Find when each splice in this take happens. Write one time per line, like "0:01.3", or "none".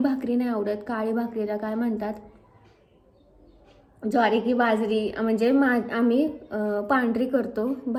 none